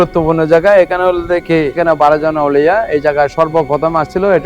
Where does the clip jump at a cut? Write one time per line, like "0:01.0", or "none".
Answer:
0:01.8